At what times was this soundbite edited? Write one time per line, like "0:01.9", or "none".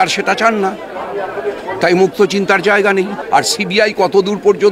0:03.2